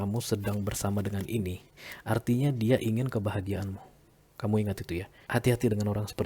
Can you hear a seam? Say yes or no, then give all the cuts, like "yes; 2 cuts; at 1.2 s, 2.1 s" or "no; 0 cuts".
yes; 1 cut; at 5.1 s